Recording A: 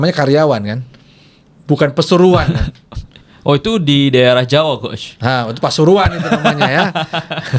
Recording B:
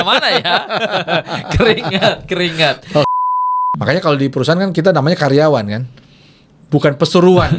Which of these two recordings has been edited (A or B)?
B